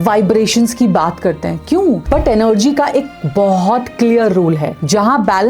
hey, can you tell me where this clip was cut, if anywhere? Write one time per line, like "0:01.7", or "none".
0:02.0